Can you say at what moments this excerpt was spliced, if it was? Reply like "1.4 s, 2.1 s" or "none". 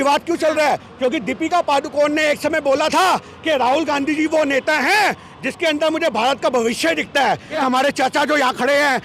7.5 s